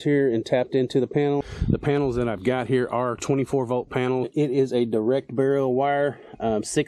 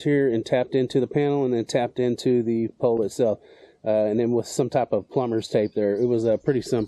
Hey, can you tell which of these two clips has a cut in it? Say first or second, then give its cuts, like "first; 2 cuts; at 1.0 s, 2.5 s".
first; 2 cuts; at 1.4 s, 4.3 s